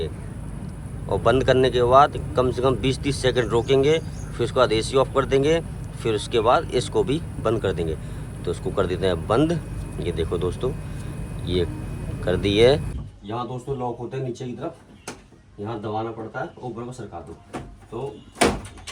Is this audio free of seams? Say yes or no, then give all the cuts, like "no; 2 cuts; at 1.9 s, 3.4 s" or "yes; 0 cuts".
no; 1 cut; at 12.9 s